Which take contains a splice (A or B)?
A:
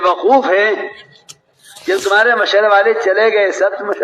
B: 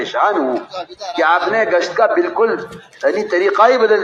A